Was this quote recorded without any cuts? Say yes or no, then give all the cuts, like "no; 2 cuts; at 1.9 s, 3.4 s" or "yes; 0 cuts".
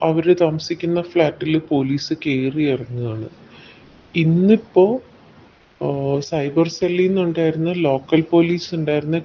yes; 0 cuts